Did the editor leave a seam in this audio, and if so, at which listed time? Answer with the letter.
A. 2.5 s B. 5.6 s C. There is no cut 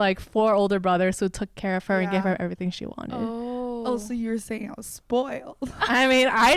C